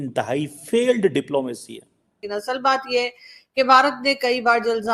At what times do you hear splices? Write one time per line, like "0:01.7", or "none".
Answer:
0:02.1